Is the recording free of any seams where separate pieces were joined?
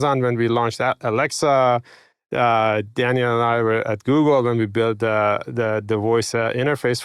yes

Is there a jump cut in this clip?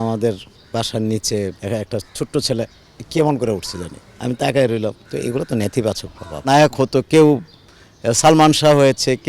yes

